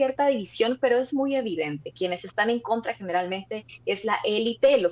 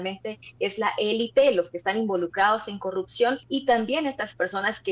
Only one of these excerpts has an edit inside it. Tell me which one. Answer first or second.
second